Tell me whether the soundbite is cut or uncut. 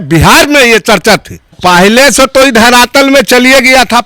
cut